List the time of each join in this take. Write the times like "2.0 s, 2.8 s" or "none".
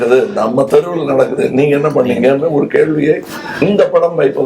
1.3 s